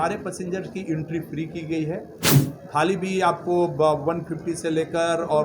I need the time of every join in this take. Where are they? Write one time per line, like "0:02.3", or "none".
0:02.3